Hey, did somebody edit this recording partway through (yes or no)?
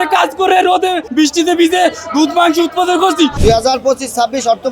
yes